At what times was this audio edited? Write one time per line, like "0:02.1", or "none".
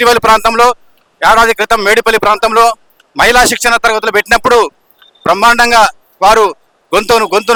none